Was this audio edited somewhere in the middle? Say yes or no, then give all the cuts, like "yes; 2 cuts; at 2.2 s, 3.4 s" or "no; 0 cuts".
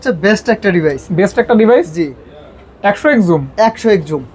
no; 0 cuts